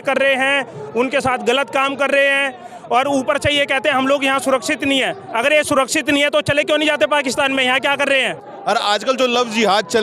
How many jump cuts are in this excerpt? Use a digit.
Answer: 1